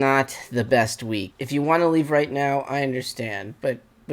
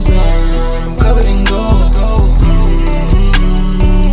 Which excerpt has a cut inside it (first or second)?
first